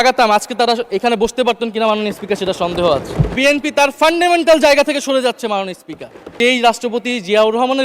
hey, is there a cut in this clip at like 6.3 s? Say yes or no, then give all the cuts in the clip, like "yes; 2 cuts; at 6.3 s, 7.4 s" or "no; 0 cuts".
yes; 2 cuts; at 3.4 s, 6.3 s